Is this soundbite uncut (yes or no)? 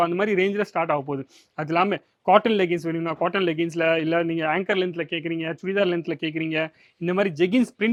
yes